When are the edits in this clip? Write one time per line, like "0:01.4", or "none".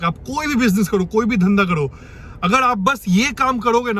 none